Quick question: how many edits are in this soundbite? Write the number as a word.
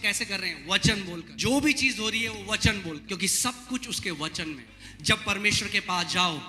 three